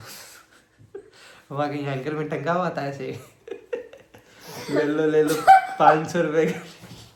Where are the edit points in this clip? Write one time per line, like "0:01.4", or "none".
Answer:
none